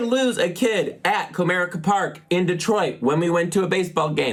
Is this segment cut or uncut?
uncut